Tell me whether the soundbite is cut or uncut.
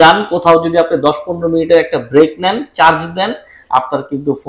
uncut